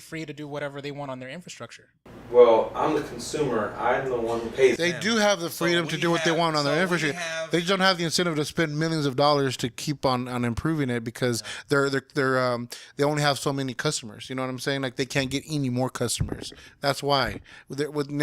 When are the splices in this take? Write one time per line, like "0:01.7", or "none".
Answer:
none